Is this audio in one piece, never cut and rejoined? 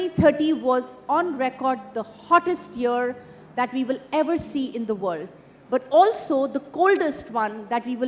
yes; 0 cuts

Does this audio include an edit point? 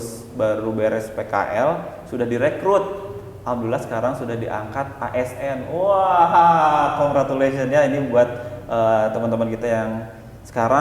no; 0 cuts

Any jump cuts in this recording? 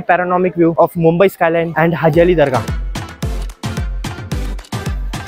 yes; 3 cuts; at 0.7 s, 1.7 s, 2.6 s

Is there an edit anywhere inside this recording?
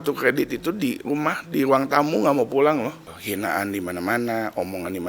yes; 1 cut; at 3.1 s

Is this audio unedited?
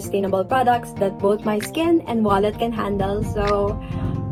yes; 0 cuts

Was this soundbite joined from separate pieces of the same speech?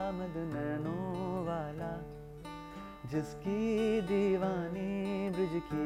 no; 0 cuts

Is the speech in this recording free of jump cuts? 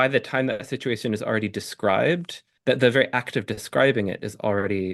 yes; 0 cuts

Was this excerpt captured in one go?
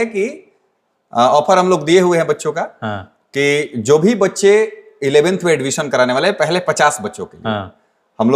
yes; 0 cuts

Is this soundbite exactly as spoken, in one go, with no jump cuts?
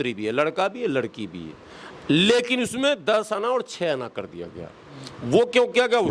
yes; 0 cuts

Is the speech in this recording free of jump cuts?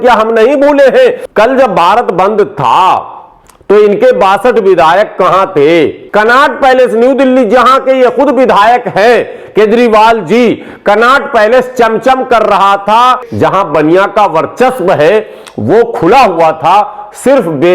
no; 3 cuts; at 1.2 s, 6.0 s, 13.2 s

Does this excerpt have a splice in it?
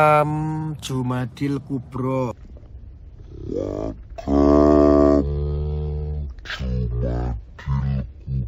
no; 0 cuts

